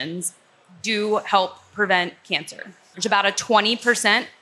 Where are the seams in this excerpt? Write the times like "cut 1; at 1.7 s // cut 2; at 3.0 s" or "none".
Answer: cut 1; at 2.9 s

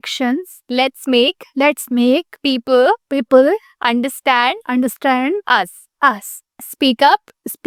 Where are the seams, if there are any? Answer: none

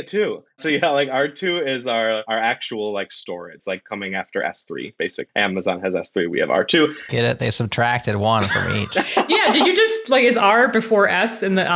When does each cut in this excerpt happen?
cut 1; at 2.2 s // cut 2; at 3.6 s // cut 3; at 5.2 s

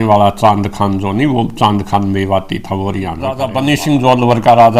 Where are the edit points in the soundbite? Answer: cut 1; at 3.4 s

